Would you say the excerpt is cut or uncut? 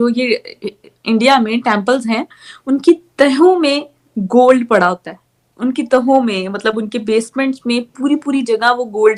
uncut